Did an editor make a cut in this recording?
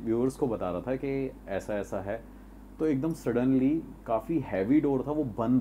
no; 0 cuts

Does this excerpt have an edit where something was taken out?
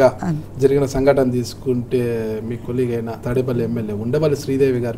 yes; 1 cut; at 3.2 s

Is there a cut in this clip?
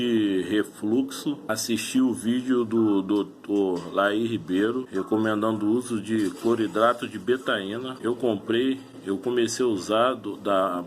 no; 0 cuts

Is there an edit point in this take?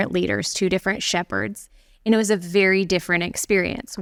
no; 0 cuts

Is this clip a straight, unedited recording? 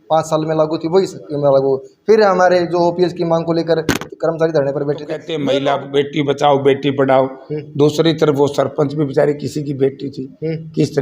no; 1 cut; at 5.3 s

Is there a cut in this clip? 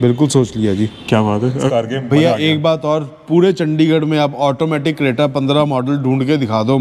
yes; 1 cut; at 1.7 s

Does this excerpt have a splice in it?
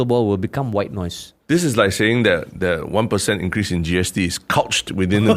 no; 0 cuts

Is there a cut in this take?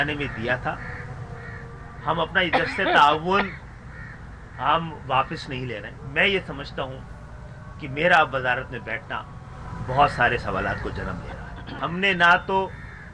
yes; 2 cuts; at 6.0 s, 11.6 s

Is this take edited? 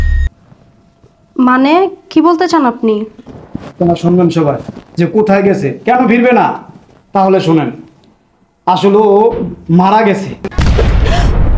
yes; 1 cut; at 3.2 s

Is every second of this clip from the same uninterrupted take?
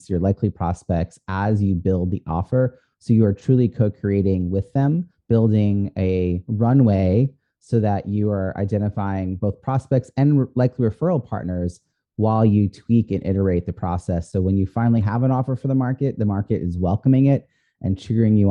yes; 0 cuts

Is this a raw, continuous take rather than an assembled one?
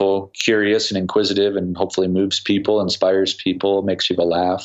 yes; 0 cuts

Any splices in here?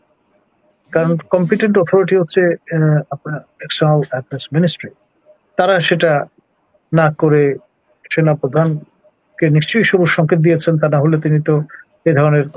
no; 0 cuts

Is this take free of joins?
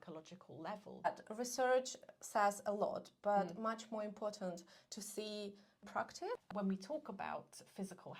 no; 2 cuts; at 1.1 s, 5.9 s

